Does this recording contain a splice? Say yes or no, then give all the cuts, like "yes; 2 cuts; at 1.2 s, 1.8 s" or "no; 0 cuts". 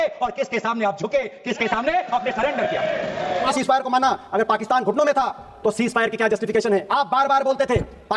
yes; 2 cuts; at 3.5 s, 6.9 s